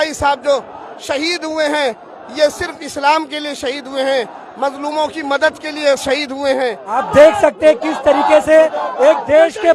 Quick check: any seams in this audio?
yes; 1 cut; at 7.0 s

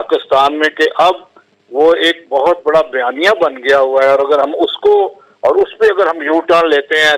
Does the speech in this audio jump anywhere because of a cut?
no; 0 cuts

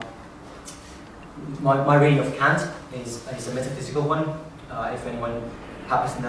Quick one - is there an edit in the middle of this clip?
no; 0 cuts

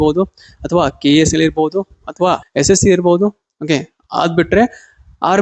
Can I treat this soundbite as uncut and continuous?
no; 1 cut; at 2.4 s

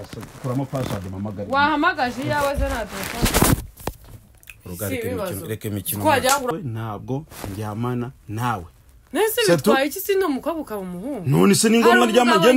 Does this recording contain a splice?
yes; 1 cut; at 6.5 s

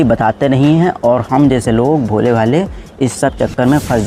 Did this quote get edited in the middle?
no; 0 cuts

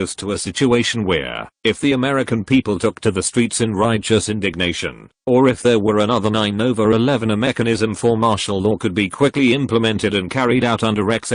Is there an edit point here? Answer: no; 0 cuts

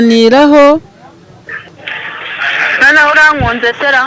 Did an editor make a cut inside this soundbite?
yes; 1 cut; at 1.6 s

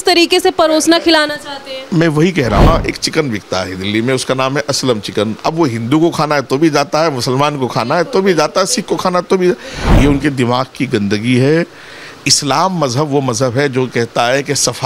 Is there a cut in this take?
yes; 2 cuts; at 2.7 s, 9.8 s

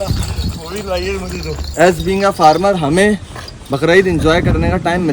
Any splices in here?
yes; 1 cut; at 1.7 s

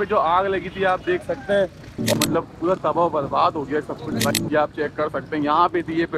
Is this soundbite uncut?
no; 2 cuts; at 2.1 s, 4.3 s

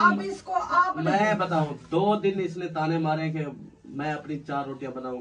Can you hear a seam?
no; 0 cuts

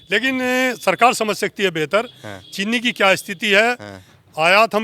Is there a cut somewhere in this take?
no; 0 cuts

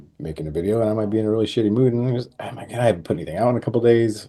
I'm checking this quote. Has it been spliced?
no; 0 cuts

